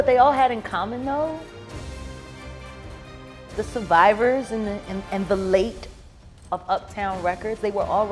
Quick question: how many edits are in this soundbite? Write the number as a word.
zero